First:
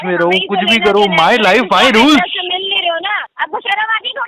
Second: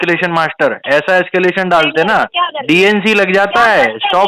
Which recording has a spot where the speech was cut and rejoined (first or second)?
first